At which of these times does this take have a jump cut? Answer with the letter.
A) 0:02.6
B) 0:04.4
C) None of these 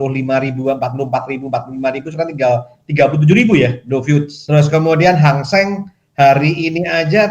B